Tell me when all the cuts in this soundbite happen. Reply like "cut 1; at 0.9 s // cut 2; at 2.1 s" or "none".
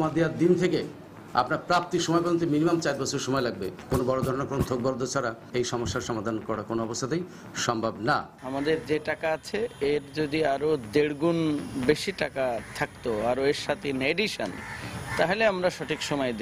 cut 1; at 3.8 s